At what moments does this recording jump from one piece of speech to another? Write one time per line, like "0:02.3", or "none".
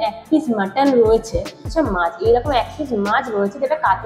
0:01.7